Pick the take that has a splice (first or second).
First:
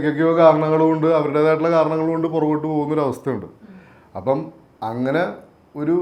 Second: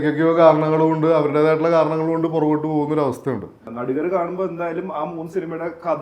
second